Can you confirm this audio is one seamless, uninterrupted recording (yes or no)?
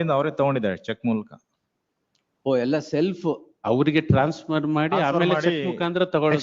yes